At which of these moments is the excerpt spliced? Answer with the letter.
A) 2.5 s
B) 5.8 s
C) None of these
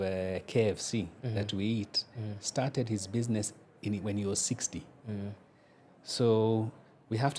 C